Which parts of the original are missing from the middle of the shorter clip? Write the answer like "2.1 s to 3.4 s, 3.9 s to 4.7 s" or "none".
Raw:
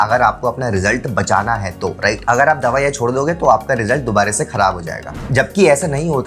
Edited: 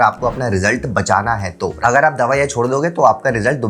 2.0 s to 2.2 s